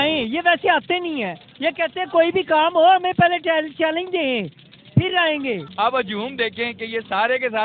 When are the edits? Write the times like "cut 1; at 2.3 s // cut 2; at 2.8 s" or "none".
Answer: cut 1; at 5.7 s